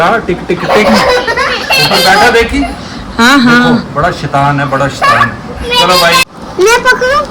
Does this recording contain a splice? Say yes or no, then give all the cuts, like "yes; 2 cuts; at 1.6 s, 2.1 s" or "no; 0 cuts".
yes; 1 cut; at 6.2 s